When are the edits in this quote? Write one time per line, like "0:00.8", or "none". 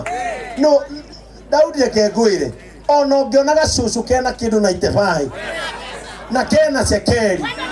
none